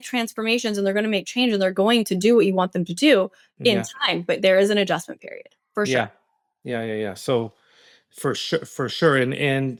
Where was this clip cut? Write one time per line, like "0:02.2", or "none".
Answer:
none